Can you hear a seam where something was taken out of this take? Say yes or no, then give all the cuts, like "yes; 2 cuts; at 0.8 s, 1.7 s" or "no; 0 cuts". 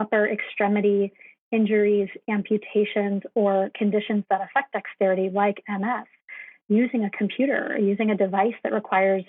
no; 0 cuts